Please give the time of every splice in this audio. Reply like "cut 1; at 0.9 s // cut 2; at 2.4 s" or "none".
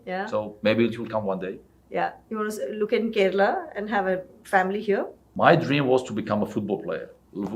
cut 1; at 5.2 s

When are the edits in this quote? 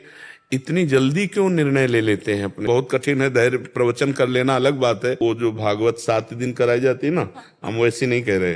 cut 1; at 2.6 s // cut 2; at 5.2 s

